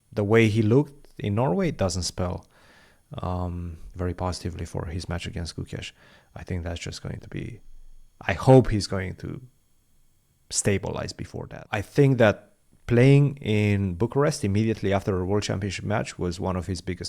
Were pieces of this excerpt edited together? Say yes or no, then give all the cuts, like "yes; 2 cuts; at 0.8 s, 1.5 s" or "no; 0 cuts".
yes; 1 cut; at 11.6 s